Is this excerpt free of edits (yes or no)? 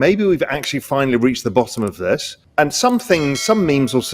no